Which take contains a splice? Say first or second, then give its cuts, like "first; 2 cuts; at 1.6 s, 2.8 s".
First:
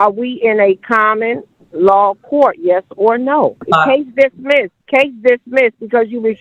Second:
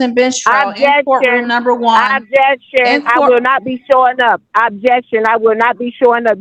first; 2 cuts; at 3.6 s, 4.8 s